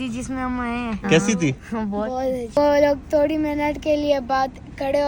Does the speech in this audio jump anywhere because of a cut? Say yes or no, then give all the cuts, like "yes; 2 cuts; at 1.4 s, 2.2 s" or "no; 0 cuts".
yes; 2 cuts; at 1.0 s, 2.6 s